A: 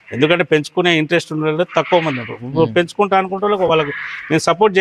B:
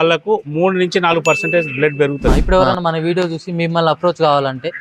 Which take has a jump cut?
B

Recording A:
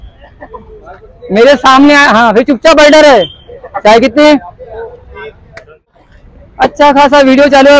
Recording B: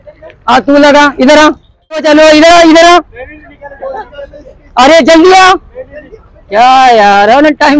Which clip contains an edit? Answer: A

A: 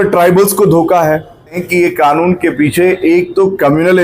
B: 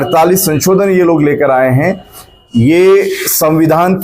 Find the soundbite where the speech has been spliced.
A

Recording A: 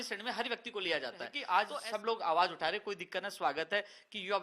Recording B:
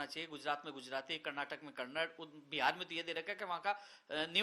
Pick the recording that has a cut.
A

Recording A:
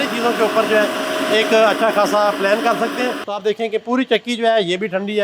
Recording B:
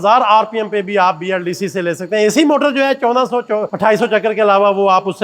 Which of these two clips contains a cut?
A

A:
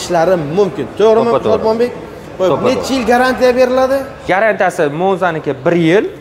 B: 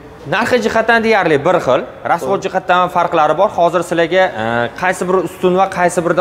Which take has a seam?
A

